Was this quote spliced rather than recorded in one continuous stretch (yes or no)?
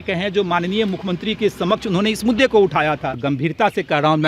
yes